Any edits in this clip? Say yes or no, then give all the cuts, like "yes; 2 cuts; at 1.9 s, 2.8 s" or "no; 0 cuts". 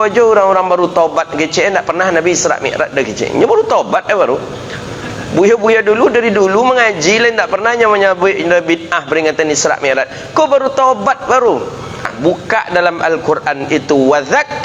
yes; 1 cut; at 12.1 s